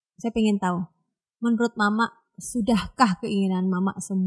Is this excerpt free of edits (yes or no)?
yes